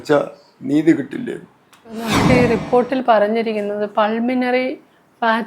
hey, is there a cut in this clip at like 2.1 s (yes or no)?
yes